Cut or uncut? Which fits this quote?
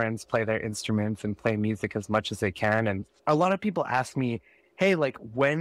cut